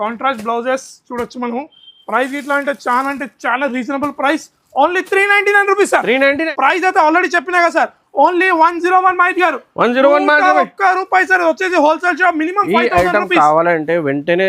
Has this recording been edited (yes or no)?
yes